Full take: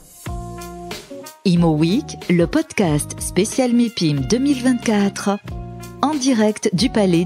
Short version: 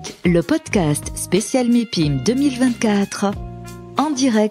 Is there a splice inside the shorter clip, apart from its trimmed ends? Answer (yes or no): no